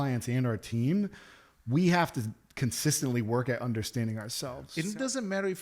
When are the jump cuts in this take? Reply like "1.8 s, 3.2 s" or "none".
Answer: 4.6 s